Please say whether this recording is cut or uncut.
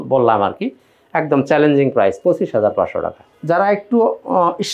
uncut